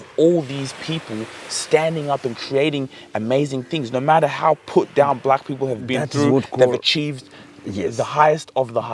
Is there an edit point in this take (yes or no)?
no